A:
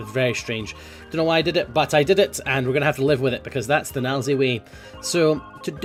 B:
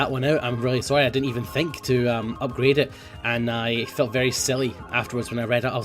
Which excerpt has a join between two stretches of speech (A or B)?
B